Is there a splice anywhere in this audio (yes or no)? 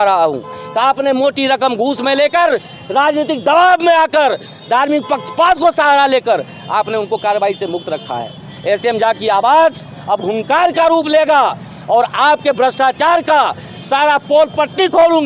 no